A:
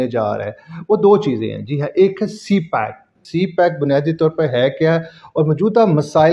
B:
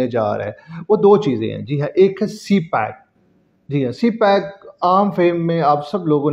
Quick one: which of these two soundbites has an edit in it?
A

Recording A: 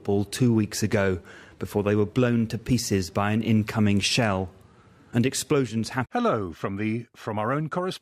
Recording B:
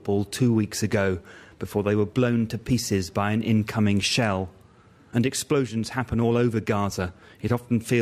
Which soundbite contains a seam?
B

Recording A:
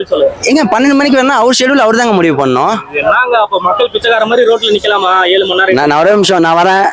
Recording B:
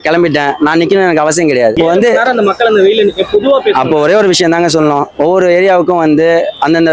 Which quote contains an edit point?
B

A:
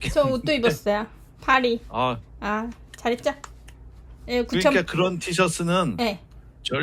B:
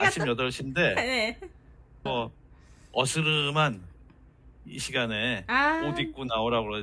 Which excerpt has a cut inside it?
B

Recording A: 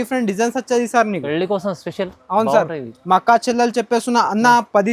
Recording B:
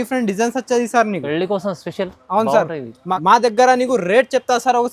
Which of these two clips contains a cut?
B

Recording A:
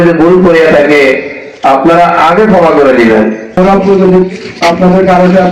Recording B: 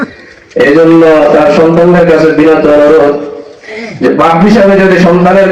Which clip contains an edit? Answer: A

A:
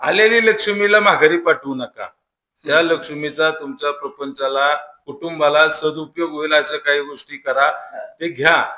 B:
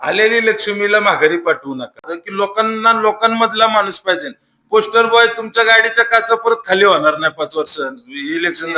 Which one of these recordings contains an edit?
B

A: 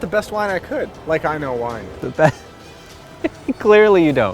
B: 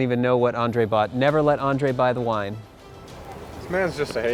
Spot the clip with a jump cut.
A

